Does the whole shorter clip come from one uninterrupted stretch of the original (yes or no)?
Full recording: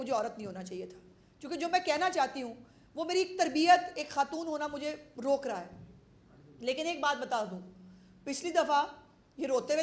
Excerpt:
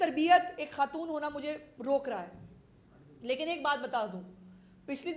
yes